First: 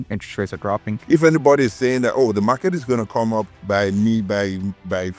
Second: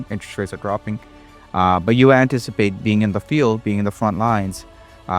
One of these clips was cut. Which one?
first; 2 cuts; at 0.9 s, 3.6 s

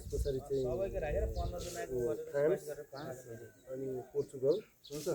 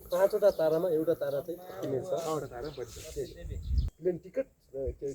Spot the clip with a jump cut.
second; 1 cut; at 3.9 s

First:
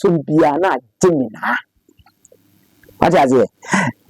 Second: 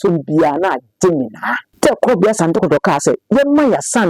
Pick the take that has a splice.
second; 1 cut; at 1.7 s

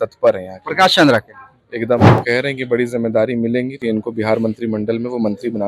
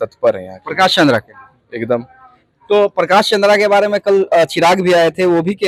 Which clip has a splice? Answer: first; 2 cuts; at 2.2 s, 3.8 s

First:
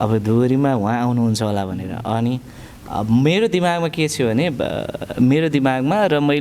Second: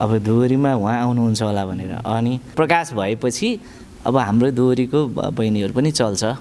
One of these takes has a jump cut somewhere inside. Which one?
second; 1 cut; at 2.5 s

